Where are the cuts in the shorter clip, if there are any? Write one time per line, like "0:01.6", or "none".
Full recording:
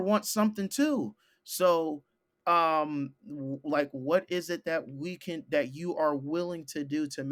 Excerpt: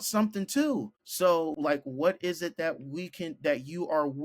0:01.0
0:01.6